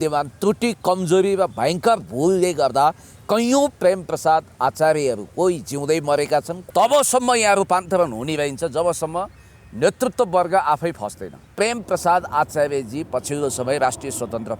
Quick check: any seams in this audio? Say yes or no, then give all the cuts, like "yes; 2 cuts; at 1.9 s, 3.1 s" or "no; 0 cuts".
yes; 2 cuts; at 6.6 s, 11.5 s